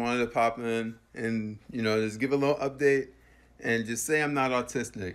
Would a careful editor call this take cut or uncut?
uncut